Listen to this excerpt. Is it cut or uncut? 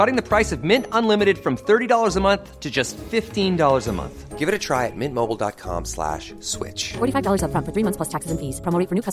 uncut